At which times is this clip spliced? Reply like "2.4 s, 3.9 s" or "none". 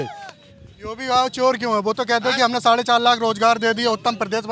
none